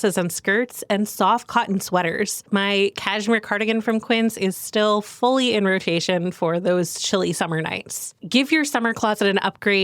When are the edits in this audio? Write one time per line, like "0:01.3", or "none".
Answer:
0:02.4